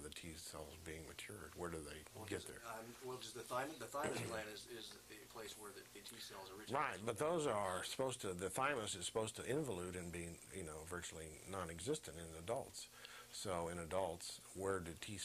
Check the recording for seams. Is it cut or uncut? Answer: uncut